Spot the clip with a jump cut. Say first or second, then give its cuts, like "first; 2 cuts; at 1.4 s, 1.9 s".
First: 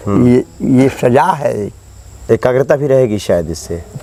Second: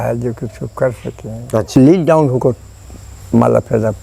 second; 1 cut; at 1.7 s